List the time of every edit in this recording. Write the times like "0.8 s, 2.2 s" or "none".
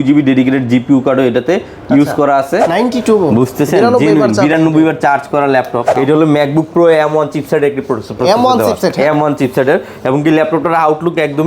2.7 s, 5.8 s